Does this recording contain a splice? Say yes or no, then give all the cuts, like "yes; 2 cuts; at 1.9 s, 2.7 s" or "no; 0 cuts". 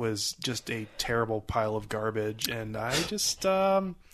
no; 0 cuts